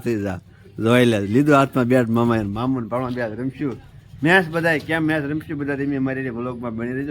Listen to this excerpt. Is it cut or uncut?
uncut